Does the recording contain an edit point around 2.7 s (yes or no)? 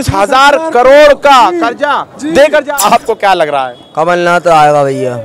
yes